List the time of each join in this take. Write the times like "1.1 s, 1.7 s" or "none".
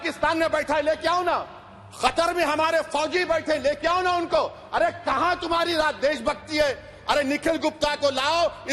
none